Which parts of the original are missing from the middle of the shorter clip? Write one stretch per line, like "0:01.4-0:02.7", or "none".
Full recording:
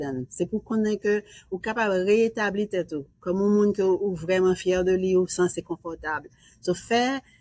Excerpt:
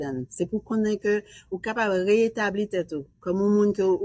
none